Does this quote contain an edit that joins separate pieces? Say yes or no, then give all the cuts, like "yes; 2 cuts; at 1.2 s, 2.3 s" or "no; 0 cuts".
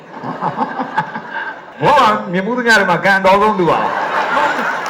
yes; 1 cut; at 1.6 s